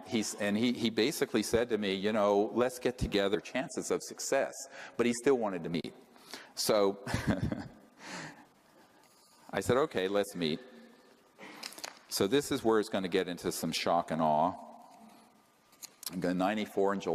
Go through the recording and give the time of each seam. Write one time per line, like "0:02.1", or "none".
none